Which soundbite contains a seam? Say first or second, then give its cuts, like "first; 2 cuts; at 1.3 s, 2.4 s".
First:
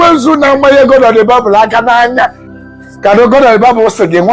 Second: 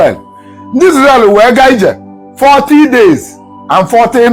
first; 1 cut; at 2.5 s